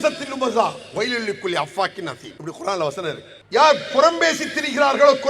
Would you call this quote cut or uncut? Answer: cut